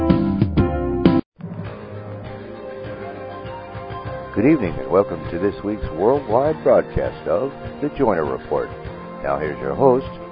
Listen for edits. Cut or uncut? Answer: cut